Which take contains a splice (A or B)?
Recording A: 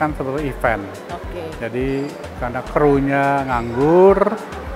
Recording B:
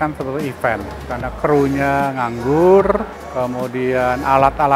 B